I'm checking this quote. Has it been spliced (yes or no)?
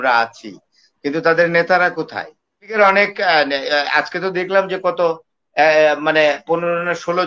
yes